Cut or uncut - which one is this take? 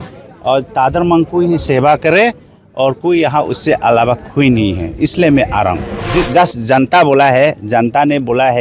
cut